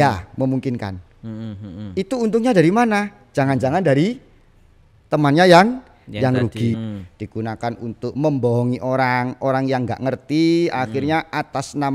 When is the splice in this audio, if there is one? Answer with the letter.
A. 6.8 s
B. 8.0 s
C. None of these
A